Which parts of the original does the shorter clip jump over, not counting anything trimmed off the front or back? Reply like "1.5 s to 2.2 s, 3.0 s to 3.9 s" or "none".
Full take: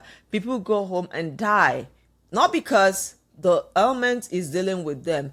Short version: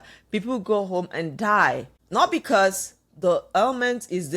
1.9 s to 2.1 s